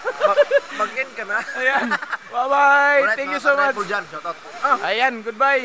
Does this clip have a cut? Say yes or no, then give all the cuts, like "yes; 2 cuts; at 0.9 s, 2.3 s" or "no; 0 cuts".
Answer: no; 0 cuts